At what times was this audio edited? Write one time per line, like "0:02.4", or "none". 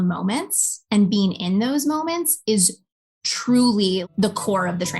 0:04.0